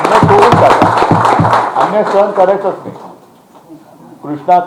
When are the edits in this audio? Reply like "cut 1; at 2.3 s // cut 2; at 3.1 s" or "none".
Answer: none